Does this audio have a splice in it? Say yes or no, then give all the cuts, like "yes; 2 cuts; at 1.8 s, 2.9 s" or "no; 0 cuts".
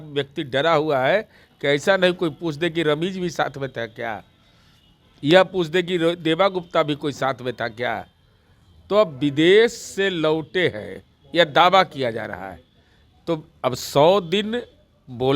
no; 0 cuts